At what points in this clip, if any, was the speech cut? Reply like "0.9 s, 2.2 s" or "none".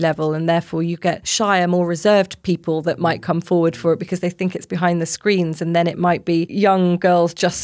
1.3 s, 6.5 s